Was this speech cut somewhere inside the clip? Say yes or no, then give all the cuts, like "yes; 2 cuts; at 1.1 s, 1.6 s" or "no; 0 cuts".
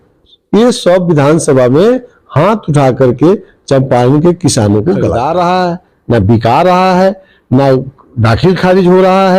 yes; 1 cut; at 5.1 s